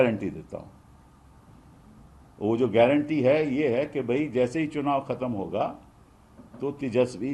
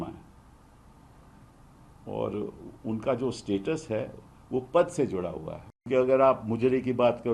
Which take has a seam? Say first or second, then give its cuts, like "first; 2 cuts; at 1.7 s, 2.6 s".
second; 1 cut; at 5.9 s